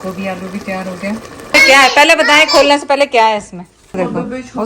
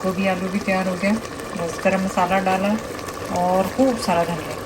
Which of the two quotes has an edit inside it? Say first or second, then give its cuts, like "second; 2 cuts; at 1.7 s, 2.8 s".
first; 2 cuts; at 1.5 s, 3.9 s